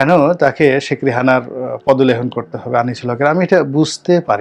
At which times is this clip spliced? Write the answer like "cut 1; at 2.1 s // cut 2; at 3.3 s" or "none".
none